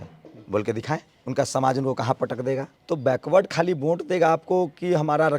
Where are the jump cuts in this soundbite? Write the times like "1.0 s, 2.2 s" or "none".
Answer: 1.1 s, 2.7 s